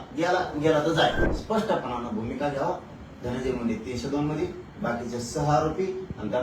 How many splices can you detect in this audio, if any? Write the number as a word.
one